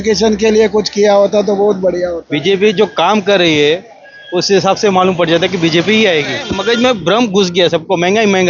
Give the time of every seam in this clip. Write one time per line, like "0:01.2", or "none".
0:02.3
0:06.4

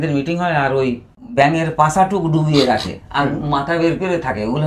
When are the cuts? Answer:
0:01.1

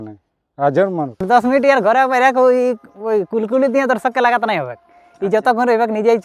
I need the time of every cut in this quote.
0:01.2

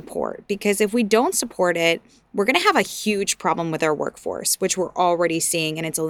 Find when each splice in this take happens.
none

